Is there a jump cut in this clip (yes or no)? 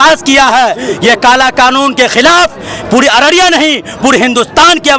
no